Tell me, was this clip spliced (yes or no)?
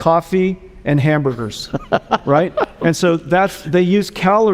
no